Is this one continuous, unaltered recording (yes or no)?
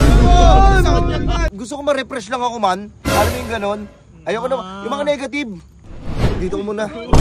no